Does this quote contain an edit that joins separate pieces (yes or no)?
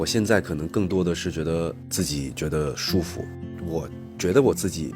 yes